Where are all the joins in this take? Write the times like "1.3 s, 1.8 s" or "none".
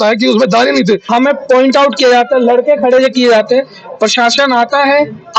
1.0 s

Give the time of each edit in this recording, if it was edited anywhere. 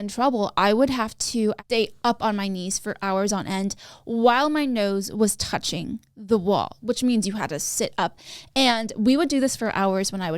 1.6 s

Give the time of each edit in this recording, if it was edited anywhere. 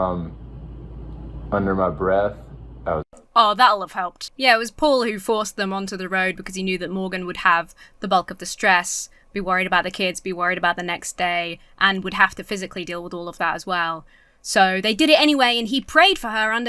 none

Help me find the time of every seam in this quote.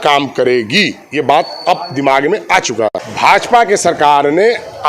3.0 s

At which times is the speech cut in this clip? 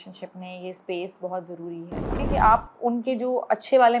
2.2 s

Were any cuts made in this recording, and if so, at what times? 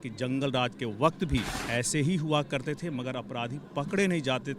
1.6 s

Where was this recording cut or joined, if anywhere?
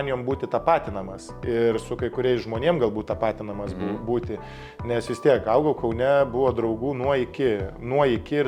none

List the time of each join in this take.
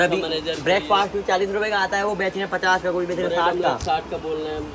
none

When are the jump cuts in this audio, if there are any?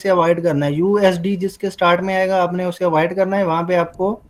none

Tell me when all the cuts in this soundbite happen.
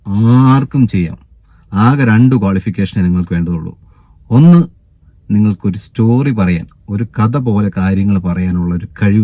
none

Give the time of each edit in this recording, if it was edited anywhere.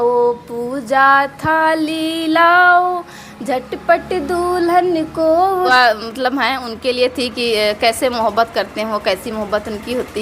5.7 s

